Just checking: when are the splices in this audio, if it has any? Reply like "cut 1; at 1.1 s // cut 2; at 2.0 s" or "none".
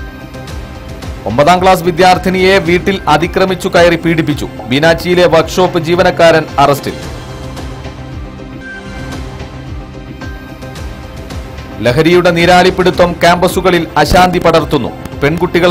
cut 1; at 1.0 s